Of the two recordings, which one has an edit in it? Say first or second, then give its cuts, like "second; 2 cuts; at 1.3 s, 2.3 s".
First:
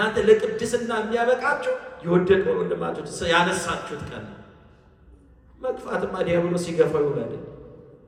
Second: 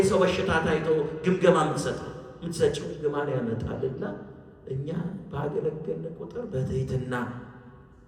second; 1 cut; at 2.9 s